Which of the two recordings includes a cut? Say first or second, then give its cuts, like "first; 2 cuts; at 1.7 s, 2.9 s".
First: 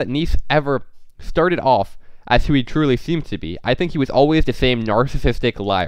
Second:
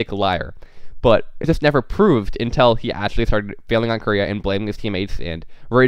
second; 1 cut; at 1.5 s